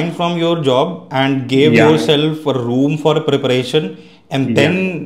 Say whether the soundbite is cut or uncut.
uncut